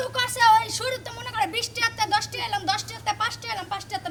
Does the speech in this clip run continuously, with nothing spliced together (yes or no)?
yes